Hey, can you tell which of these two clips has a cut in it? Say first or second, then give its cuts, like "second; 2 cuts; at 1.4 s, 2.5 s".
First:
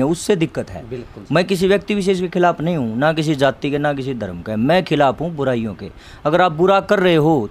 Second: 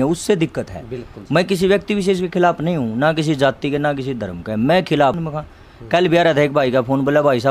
second; 1 cut; at 5.2 s